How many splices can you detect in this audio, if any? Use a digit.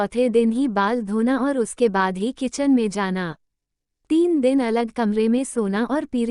0